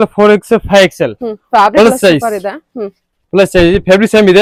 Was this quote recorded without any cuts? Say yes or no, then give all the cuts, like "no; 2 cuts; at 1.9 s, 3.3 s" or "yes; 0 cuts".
yes; 0 cuts